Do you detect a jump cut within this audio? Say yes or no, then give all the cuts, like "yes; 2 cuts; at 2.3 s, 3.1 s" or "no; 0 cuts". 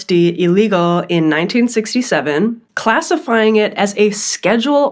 yes; 1 cut; at 2.7 s